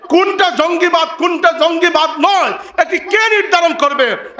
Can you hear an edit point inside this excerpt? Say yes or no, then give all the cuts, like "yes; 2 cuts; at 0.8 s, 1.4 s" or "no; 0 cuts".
no; 0 cuts